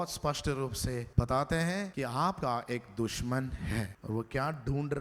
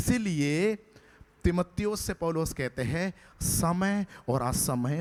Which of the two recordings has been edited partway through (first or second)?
first